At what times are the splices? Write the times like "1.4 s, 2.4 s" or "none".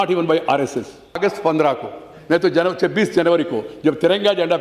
1.2 s